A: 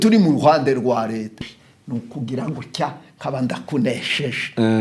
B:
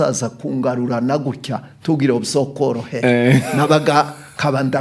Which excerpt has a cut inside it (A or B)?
A